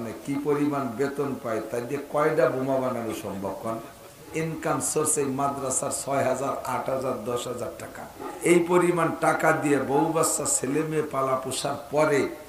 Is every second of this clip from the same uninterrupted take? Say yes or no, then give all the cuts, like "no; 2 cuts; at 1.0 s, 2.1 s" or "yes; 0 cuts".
no; 2 cuts; at 4.3 s, 8.3 s